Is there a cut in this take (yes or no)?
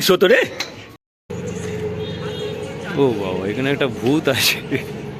yes